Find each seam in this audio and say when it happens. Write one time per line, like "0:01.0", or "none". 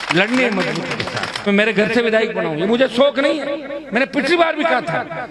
0:01.5